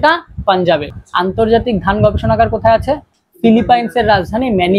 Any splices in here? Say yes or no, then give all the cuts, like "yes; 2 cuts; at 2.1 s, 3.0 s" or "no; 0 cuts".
yes; 1 cut; at 0.9 s